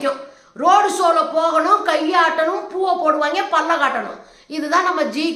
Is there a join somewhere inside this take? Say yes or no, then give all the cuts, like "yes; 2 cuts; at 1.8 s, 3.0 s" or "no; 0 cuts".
no; 0 cuts